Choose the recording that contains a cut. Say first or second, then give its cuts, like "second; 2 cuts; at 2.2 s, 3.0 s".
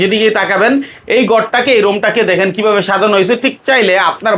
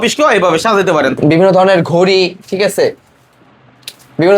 second; 1 cut; at 1.2 s